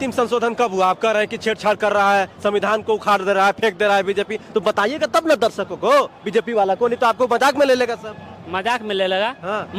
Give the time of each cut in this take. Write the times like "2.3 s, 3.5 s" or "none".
none

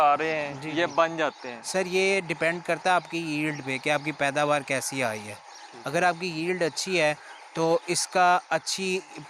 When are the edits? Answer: none

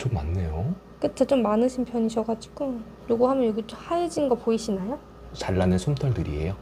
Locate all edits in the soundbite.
2.9 s, 5.4 s

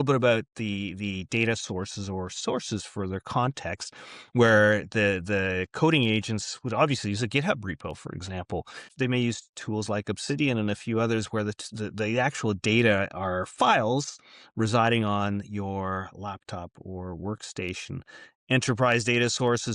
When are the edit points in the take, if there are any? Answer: 8.9 s

